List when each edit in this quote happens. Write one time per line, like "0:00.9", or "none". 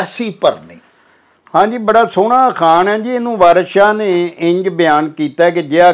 none